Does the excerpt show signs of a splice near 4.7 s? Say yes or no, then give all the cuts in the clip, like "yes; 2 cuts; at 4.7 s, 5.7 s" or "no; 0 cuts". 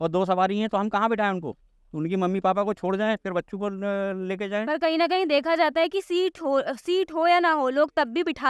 no; 0 cuts